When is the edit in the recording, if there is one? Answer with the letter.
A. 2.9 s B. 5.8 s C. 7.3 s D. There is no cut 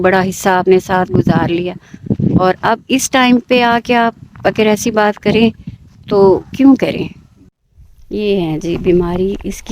C